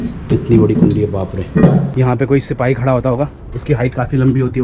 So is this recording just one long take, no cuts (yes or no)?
no